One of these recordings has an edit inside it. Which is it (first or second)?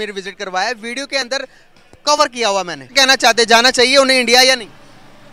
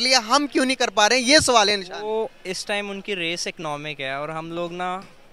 first